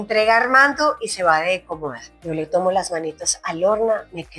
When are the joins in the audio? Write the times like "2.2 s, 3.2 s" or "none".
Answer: 2.1 s